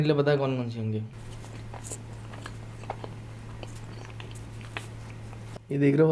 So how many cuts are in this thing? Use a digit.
1